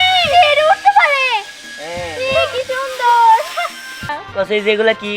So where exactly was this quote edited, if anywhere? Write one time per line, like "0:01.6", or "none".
0:04.2